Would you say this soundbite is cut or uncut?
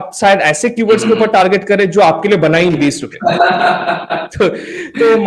cut